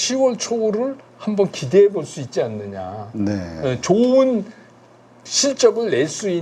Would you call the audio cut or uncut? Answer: uncut